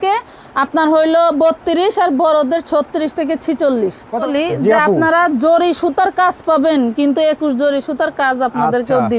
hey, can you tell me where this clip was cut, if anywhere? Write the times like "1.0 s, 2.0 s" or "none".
4.3 s